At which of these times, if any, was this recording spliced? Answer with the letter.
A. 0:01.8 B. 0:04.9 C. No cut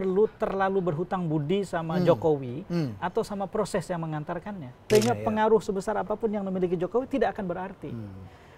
B